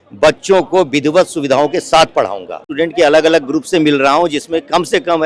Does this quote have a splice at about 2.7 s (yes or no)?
yes